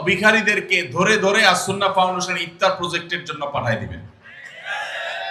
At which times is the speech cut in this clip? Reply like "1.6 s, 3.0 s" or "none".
none